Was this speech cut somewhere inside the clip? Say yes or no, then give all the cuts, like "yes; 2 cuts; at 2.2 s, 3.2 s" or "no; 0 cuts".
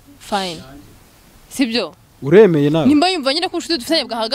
no; 0 cuts